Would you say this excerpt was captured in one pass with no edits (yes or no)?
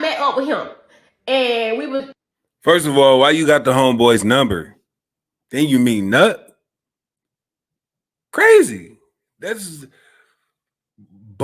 yes